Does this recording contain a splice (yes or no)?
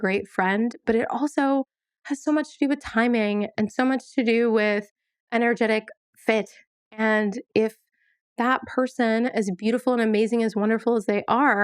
no